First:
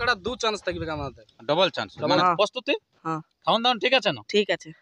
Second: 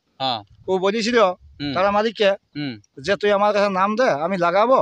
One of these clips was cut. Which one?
first; 1 cut; at 2.2 s

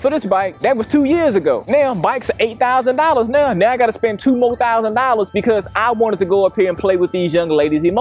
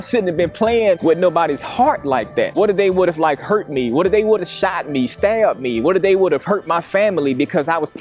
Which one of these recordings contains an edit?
second; 1 cut; at 2.5 s

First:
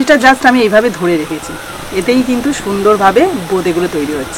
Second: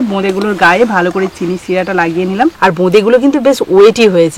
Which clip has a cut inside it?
second; 1 cut; at 2.6 s

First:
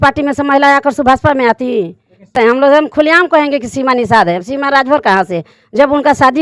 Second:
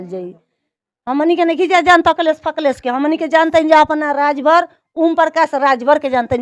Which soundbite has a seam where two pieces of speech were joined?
first; 1 cut; at 2.3 s

